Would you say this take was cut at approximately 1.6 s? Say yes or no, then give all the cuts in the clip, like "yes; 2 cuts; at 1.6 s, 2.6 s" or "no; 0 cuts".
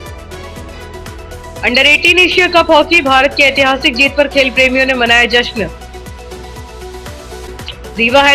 yes; 1 cut; at 1.6 s